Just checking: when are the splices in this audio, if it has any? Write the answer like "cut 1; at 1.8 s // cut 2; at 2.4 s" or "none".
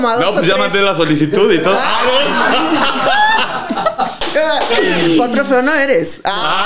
none